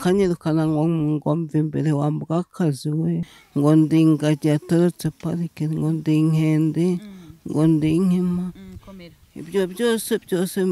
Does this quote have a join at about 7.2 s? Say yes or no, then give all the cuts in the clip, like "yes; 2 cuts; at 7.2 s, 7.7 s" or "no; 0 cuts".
no; 1 cut; at 3.4 s